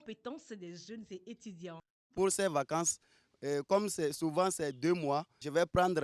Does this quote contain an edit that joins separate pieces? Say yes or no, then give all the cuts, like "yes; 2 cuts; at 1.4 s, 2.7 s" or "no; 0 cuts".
yes; 1 cut; at 1.9 s